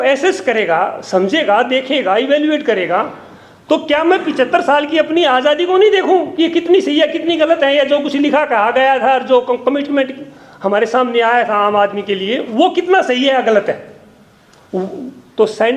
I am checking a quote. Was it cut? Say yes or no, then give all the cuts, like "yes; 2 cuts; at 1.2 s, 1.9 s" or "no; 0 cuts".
no; 0 cuts